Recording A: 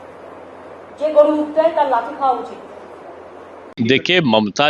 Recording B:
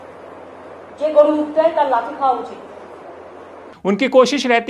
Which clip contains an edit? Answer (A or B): A